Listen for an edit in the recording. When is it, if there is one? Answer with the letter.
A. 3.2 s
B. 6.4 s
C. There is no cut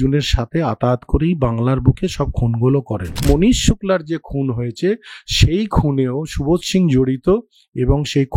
A